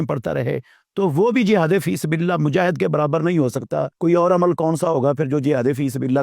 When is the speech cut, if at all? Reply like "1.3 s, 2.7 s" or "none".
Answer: 3.9 s